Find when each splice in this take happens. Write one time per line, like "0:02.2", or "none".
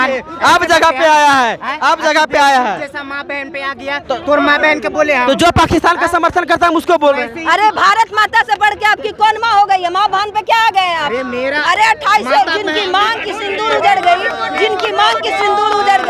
none